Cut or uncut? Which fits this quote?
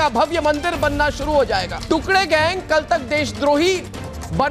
cut